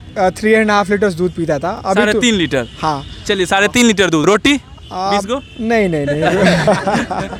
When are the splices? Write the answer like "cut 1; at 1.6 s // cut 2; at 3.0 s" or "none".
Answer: none